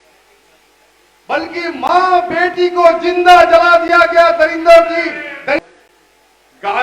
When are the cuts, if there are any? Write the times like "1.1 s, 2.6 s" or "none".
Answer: 5.6 s

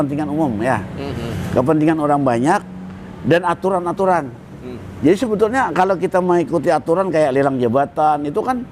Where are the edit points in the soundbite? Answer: none

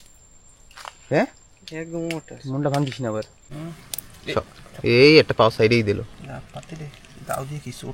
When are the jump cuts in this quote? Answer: 3.4 s

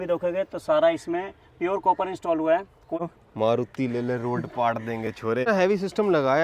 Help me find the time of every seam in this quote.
3.0 s, 5.5 s

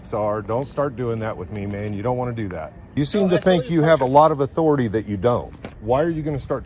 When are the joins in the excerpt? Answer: 2.9 s, 5.8 s

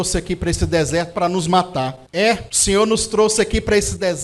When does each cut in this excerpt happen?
2.2 s

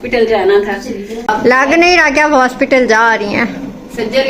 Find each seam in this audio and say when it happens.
1.1 s

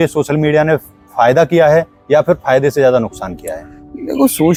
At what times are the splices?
none

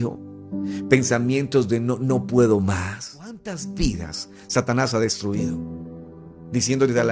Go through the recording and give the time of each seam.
3.5 s

